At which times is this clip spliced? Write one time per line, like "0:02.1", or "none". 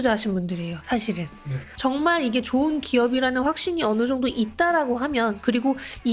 0:01.6

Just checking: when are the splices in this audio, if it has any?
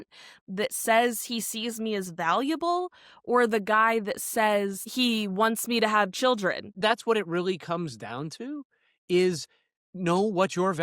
0:04.8
0:06.8

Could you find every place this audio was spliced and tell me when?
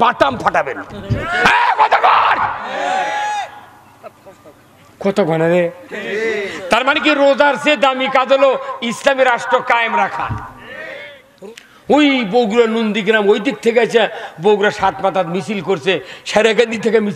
0:11.2

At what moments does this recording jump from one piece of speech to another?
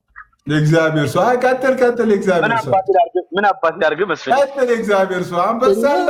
none

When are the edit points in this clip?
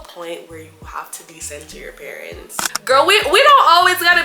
0:02.7

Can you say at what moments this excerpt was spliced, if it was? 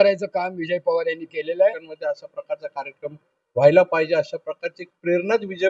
0:01.9

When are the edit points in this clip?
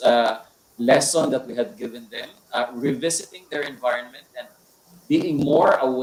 none

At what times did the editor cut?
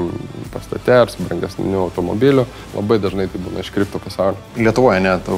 0:02.6
0:04.5

